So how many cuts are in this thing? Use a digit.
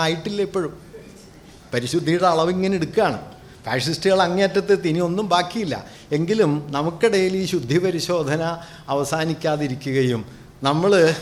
0